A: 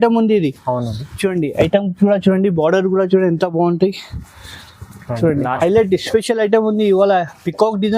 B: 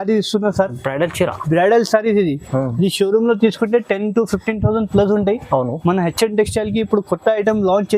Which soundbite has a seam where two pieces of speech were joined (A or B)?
A